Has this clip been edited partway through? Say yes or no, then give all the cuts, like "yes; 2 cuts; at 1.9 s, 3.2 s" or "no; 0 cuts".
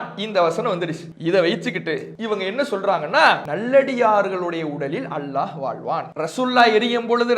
yes; 4 cuts; at 1.1 s, 2.1 s, 3.5 s, 6.1 s